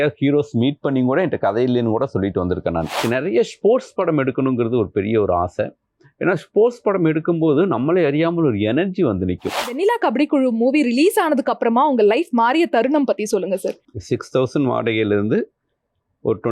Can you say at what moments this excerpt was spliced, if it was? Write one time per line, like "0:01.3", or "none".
0:03.0
0:09.7
0:13.8

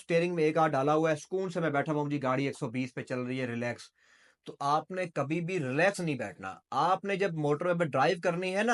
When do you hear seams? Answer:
none

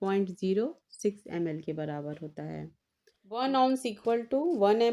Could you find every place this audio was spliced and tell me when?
0:03.4

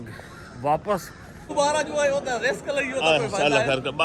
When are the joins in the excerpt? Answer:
0:01.5

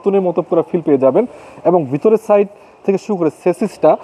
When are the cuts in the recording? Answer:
none

